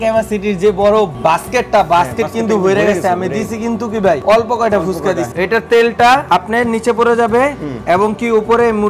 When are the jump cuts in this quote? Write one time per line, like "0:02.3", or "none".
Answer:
0:01.1
0:04.2
0:05.3
0:06.2